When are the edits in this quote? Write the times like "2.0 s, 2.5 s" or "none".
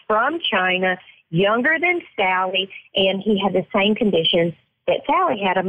none